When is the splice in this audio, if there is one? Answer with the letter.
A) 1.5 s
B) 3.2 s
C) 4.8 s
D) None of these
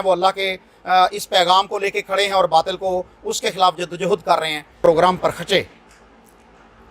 C